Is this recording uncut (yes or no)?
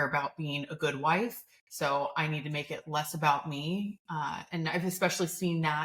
yes